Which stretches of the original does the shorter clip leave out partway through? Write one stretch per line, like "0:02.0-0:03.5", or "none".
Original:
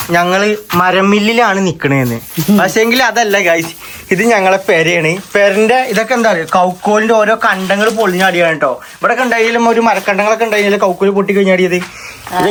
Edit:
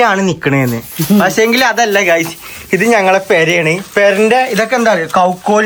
none

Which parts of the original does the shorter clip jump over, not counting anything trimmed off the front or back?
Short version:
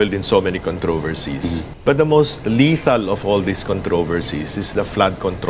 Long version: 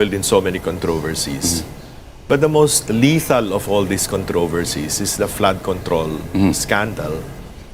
0:01.7-0:02.1

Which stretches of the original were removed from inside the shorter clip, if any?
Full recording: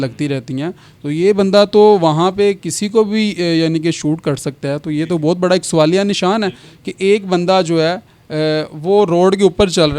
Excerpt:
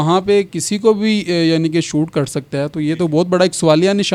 none

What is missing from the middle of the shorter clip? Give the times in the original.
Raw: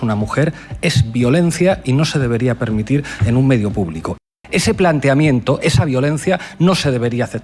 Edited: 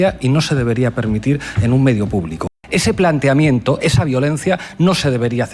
0:04.1-0:04.3

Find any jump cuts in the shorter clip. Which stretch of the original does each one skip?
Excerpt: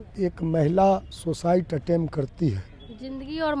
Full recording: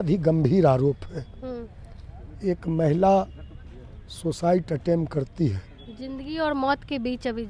0:03.4-0:04.1

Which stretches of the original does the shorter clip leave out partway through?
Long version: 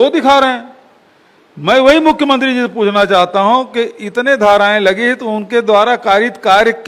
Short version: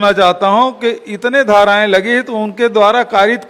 none

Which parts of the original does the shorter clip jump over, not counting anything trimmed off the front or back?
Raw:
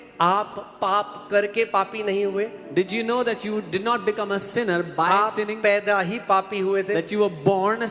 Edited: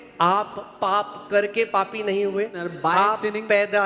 0:02.6-0:04.8

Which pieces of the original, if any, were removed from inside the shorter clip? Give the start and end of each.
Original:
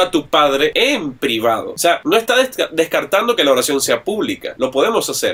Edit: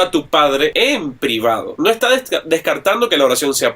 0:01.7-0:02.0

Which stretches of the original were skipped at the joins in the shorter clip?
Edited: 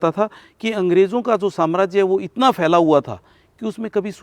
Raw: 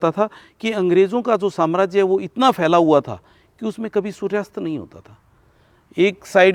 none

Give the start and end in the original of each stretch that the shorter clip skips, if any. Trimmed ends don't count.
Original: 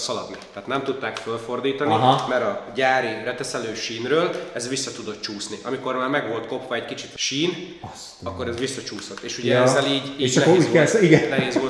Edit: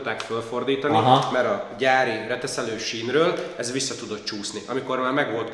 none

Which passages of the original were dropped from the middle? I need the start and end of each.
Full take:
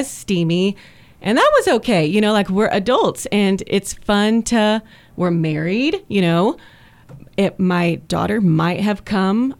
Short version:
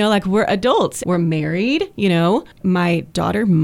0:03.2-0:05.1
0:06.7-0:07.5

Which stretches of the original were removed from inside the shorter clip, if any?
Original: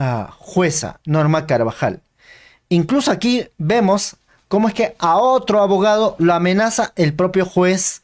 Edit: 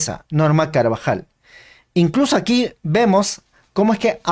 none

